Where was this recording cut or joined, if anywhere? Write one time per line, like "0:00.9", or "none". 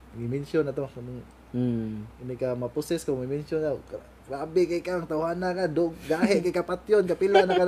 none